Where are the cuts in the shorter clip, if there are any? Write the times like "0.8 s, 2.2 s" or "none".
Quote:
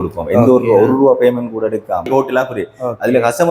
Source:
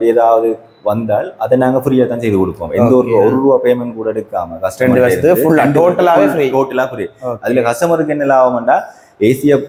2.1 s